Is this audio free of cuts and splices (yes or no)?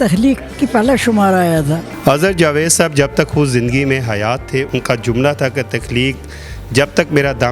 no